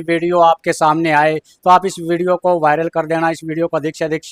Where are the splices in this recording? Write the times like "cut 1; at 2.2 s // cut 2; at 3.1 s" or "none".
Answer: none